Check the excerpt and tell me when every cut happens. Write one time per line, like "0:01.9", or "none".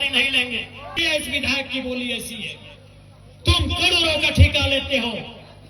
0:01.0